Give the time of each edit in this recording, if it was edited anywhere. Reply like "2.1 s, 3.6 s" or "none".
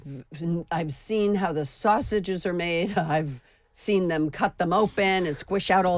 none

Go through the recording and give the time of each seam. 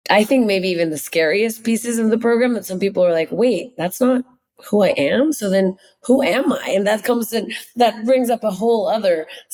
none

